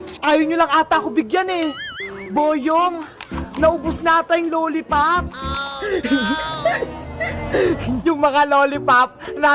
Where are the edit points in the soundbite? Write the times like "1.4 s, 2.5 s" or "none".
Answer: 8.0 s